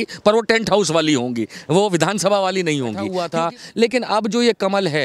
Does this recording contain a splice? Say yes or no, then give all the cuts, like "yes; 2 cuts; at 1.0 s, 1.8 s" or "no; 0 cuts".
yes; 1 cut; at 3.2 s